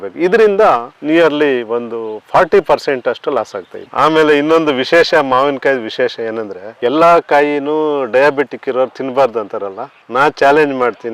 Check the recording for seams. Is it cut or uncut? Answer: cut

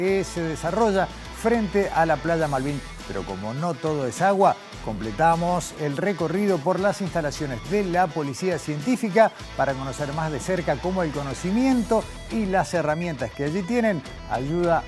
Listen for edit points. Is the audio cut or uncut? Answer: uncut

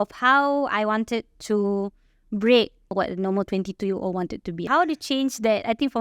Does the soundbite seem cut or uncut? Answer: cut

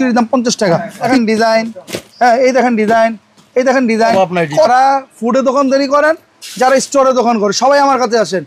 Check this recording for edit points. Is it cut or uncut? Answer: cut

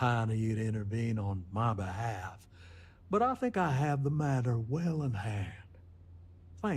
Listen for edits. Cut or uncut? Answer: uncut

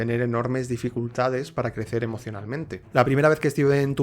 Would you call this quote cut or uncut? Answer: cut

